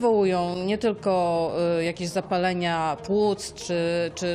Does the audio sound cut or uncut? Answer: uncut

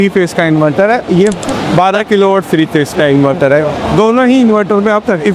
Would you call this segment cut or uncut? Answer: uncut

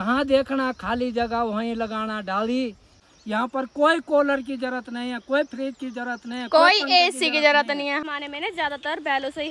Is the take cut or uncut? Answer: cut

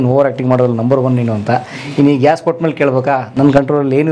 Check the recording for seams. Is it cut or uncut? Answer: uncut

